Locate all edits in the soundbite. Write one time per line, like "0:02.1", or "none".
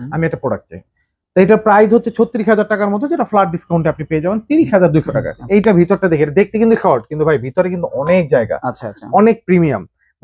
0:05.4